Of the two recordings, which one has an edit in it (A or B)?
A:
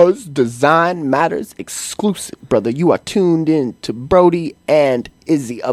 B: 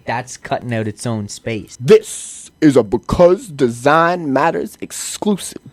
B